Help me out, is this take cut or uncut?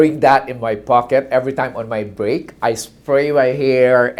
uncut